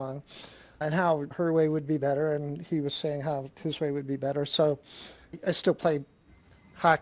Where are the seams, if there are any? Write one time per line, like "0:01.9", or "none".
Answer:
0:05.4